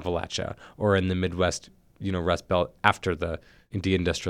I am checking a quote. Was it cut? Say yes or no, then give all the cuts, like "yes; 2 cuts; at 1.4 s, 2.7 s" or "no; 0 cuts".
no; 0 cuts